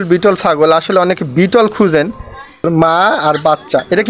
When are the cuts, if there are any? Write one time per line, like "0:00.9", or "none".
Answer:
0:02.7